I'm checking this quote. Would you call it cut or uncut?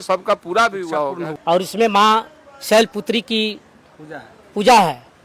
cut